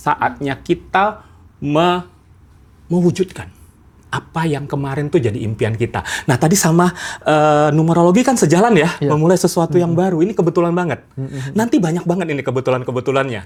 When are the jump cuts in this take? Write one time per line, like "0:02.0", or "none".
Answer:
none